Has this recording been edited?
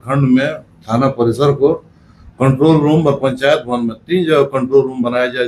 no; 0 cuts

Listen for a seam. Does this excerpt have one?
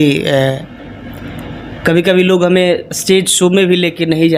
no; 0 cuts

